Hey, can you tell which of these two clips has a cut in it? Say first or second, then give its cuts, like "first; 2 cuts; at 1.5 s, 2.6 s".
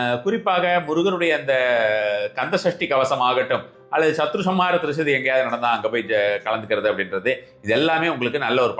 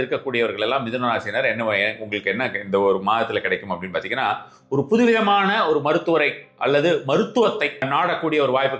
second; 1 cut; at 7.8 s